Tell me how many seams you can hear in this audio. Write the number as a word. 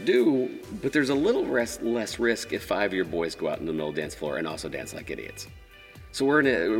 zero